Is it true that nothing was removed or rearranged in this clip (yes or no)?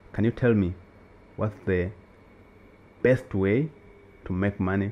yes